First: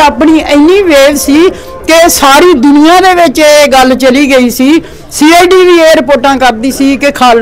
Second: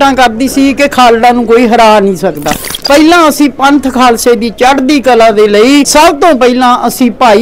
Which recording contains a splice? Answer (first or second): second